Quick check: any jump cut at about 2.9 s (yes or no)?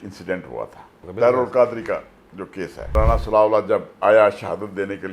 yes